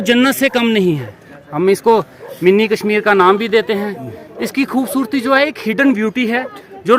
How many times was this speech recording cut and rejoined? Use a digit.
0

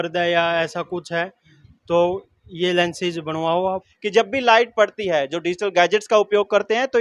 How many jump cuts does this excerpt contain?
1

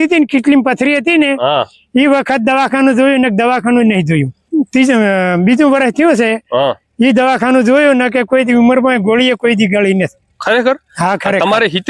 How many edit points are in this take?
1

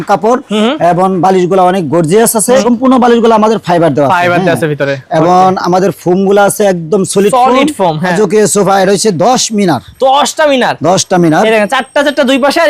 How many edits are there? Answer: 2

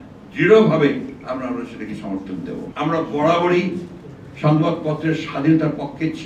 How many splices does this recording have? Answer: 1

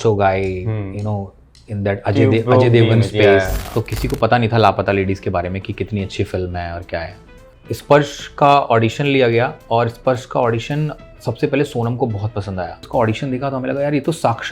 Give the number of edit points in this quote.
3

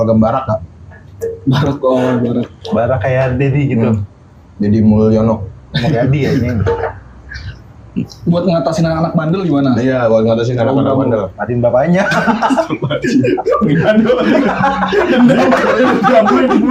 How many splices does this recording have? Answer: 0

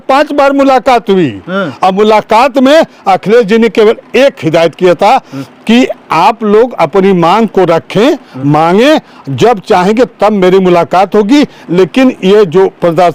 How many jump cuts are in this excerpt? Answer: 0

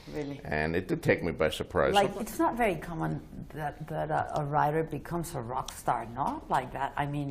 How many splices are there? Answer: 1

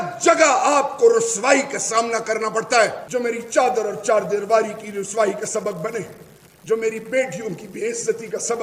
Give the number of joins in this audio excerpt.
1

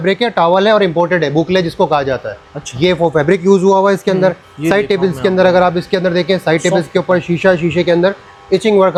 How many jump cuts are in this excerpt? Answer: 0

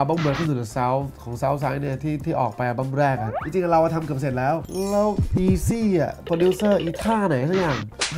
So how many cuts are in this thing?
0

